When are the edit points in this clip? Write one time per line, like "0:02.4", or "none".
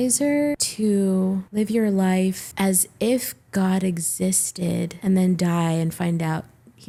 none